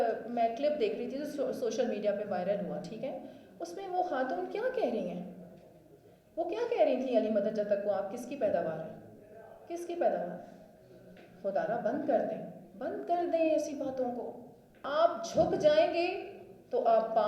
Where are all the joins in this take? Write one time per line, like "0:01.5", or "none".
0:14.8